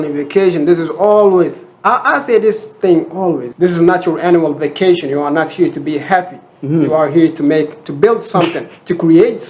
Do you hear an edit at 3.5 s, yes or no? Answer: yes